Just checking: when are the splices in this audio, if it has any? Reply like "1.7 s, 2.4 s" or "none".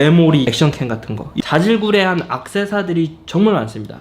0.9 s